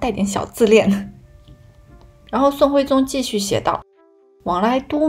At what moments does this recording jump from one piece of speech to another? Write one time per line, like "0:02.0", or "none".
none